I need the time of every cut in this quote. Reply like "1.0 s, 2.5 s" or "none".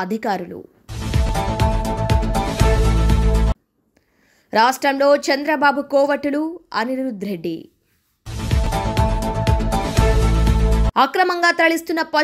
none